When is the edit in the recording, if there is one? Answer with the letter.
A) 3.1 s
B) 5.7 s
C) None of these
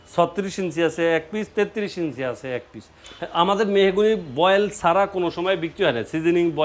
A